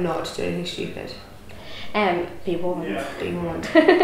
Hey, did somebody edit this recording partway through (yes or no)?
no